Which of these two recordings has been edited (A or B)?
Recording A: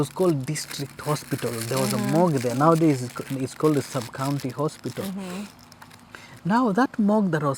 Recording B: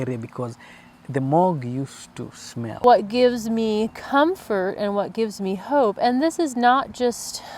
B